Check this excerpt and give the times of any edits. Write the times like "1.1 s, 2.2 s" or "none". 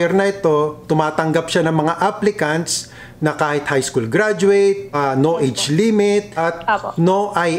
4.9 s, 6.3 s